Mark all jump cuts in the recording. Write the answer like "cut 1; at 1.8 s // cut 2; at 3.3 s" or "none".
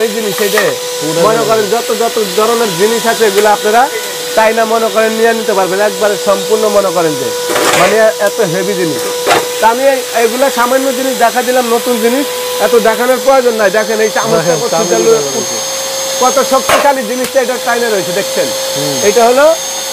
none